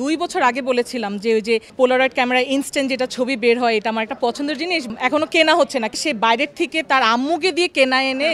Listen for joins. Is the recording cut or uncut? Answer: cut